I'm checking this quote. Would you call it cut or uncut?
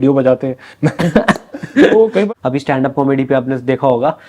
cut